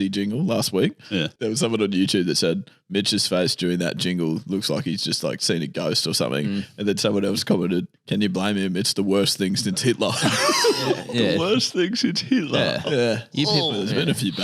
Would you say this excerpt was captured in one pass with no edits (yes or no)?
no